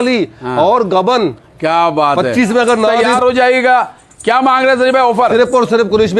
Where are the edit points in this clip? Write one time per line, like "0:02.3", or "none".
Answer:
0:03.1